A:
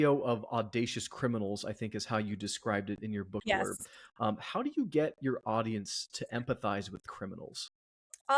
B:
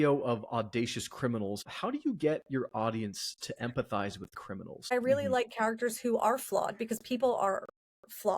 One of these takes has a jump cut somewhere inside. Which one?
B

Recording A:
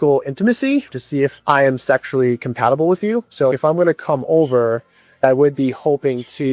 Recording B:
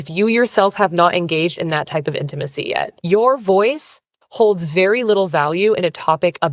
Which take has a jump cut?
A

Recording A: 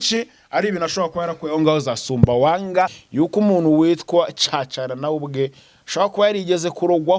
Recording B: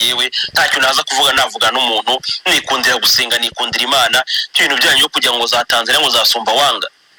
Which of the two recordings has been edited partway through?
A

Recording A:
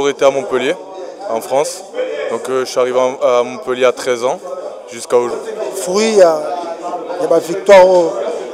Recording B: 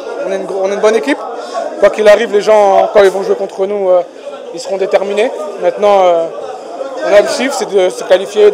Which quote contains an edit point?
A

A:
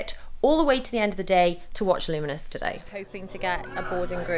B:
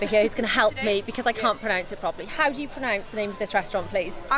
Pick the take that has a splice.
A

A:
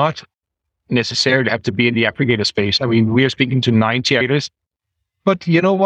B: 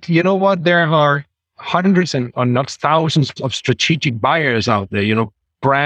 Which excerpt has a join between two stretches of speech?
A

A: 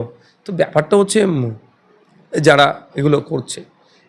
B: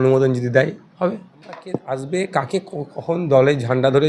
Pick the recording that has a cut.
B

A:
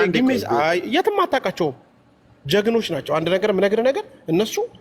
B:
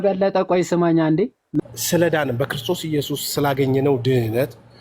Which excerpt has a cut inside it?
B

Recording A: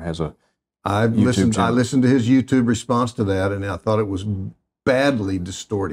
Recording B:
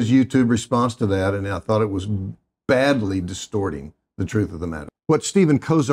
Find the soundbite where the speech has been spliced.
B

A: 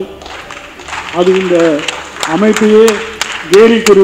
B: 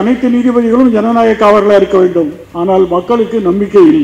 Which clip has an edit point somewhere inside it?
B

